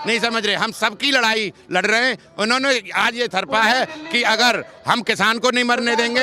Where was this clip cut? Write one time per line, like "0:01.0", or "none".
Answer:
none

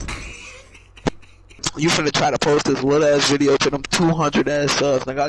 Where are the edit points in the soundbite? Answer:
0:01.6

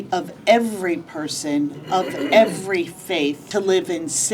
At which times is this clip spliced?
0:03.4

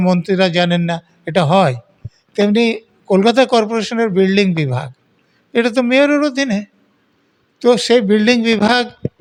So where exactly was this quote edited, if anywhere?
none

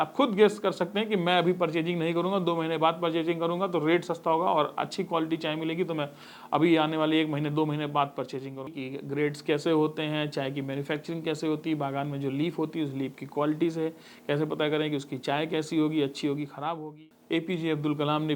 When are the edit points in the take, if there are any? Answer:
0:08.7
0:16.7

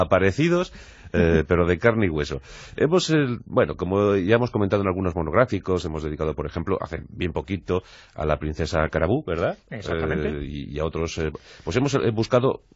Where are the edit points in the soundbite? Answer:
0:01.7

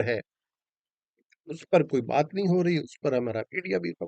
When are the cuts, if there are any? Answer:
none

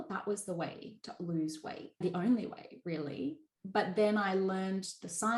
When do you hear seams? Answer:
0:02.0

